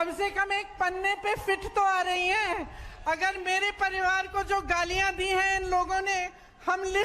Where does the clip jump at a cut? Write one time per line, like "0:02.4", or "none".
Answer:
none